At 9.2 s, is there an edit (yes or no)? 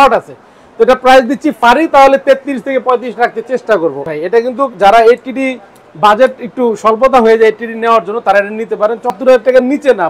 yes